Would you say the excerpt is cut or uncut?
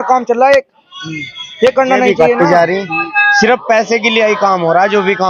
cut